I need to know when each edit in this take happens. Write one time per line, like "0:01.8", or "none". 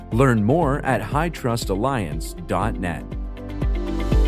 0:03.3